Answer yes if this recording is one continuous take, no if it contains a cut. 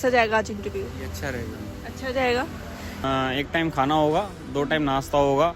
no